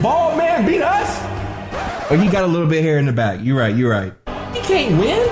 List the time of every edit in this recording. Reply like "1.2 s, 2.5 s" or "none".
none